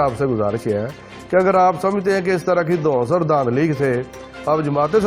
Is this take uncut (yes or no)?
yes